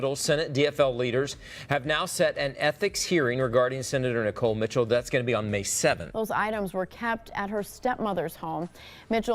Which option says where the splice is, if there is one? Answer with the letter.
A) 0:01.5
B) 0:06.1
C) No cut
B